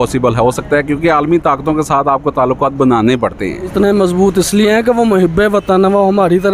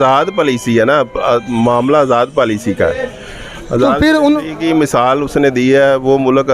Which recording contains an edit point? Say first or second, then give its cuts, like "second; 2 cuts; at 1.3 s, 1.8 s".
first; 1 cut; at 3.6 s